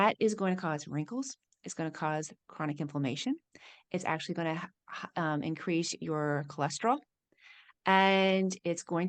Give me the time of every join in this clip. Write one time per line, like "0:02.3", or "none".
none